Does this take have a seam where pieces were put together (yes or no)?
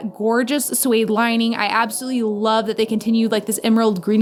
no